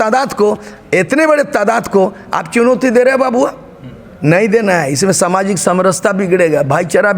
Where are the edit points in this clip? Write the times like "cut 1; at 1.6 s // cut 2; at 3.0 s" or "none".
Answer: none